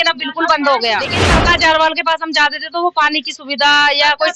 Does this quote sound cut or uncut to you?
cut